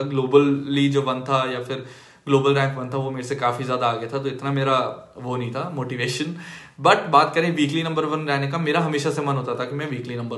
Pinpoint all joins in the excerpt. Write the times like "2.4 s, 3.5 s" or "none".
none